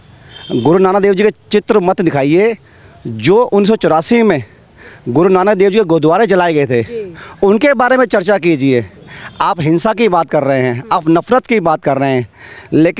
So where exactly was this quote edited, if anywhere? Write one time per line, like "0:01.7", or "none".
none